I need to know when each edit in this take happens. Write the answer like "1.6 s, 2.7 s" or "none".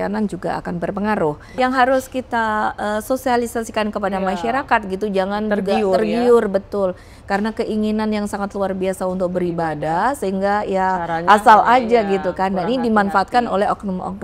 1.5 s